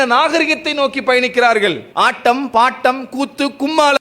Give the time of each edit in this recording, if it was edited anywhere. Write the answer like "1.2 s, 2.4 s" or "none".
1.8 s